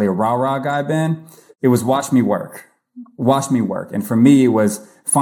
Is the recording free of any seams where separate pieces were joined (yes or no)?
no